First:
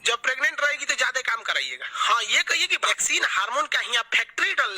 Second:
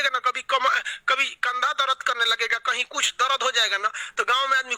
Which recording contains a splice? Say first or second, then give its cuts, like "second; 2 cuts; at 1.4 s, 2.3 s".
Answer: first; 1 cut; at 2.9 s